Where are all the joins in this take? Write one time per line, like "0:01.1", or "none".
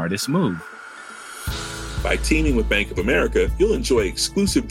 none